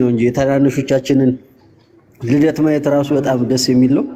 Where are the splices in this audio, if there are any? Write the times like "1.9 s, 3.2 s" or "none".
none